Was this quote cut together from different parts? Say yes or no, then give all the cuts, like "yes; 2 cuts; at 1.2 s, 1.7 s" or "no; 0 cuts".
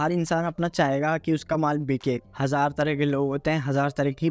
yes; 1 cut; at 2.3 s